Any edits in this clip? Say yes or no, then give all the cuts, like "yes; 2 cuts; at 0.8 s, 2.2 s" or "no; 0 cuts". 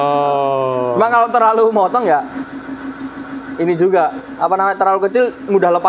no; 0 cuts